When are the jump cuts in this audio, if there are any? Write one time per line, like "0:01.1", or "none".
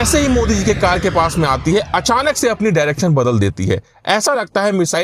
none